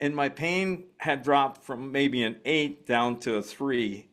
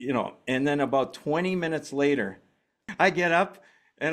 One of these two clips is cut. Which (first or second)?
second